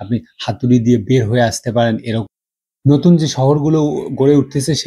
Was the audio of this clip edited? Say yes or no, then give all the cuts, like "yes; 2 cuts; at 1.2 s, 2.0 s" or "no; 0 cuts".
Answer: yes; 1 cut; at 2.2 s